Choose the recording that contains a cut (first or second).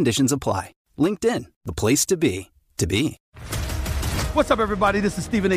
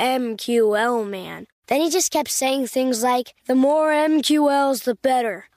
first